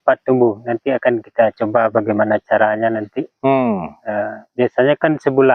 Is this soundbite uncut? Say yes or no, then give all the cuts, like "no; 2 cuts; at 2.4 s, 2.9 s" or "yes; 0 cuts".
yes; 0 cuts